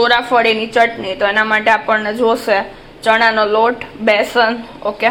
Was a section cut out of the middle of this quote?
no; 0 cuts

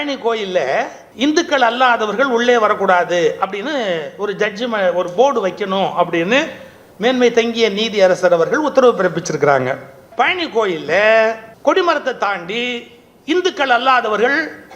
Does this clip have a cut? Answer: yes; 3 cuts; at 1.0 s, 10.0 s, 11.5 s

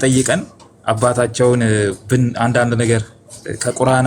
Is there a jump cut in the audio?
no; 0 cuts

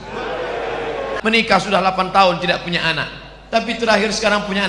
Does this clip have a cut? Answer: yes; 1 cut; at 1.1 s

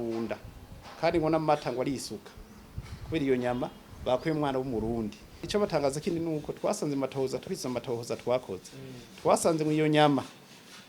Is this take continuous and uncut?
no; 1 cut; at 5.4 s

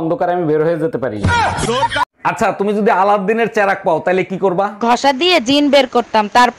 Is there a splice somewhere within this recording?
no; 0 cuts

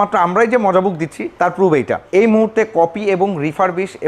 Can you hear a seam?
yes; 2 cuts; at 1.2 s, 2.0 s

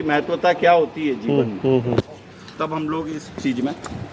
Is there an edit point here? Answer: no; 0 cuts

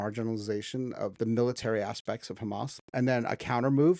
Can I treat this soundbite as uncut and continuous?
no; 2 cuts; at 1.1 s, 2.9 s

